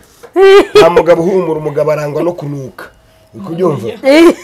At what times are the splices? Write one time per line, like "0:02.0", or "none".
none

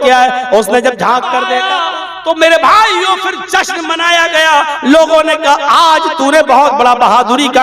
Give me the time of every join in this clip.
0:01.5

